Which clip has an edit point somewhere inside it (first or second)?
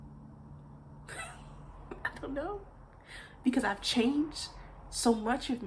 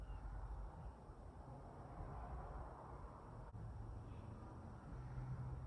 second